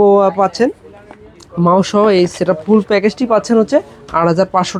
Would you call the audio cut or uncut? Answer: uncut